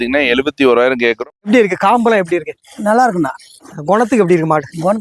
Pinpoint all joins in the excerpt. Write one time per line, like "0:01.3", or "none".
0:01.2